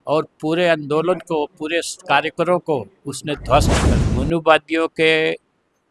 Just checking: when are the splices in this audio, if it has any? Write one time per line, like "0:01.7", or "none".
0:03.7